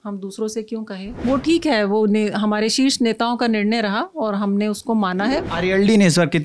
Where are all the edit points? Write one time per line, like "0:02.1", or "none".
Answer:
0:01.2
0:05.5